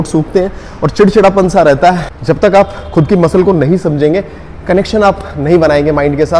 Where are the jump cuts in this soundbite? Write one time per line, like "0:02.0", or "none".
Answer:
0:02.1